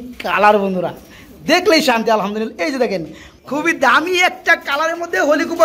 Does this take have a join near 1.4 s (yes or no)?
no